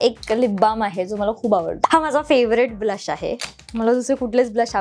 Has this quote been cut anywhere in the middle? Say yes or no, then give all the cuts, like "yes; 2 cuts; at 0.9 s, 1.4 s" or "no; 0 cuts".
yes; 1 cut; at 1.8 s